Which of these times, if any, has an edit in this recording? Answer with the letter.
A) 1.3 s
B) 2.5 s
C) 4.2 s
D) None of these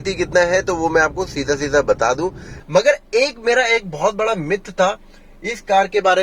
B